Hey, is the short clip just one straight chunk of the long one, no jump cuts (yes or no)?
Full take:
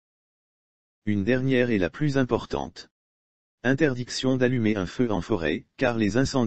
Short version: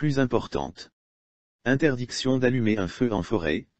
yes